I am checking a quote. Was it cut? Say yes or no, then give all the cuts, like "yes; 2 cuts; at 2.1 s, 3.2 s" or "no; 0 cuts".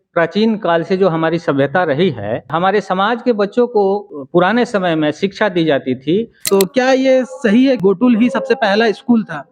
yes; 4 cuts; at 2.5 s, 4.1 s, 6.4 s, 7.8 s